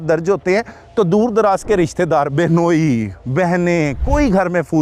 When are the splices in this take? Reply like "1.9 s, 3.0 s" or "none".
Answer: none